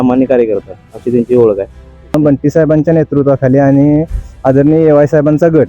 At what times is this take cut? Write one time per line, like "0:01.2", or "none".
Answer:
0:02.1